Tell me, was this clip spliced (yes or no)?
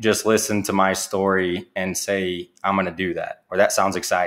no